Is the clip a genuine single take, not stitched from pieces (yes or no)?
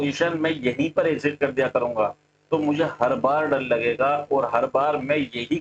yes